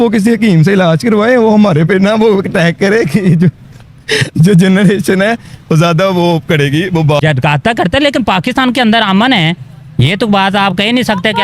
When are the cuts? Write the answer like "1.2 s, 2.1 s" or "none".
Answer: 7.2 s